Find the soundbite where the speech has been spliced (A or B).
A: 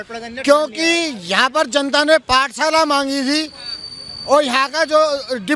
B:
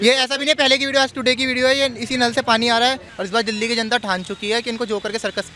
B